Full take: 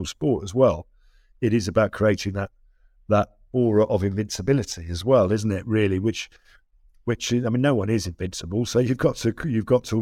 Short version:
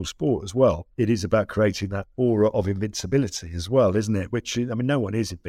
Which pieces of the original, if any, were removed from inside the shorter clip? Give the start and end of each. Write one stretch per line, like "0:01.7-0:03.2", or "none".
0:00.9-0:01.3
0:02.5-0:03.4
0:05.6-0:07.0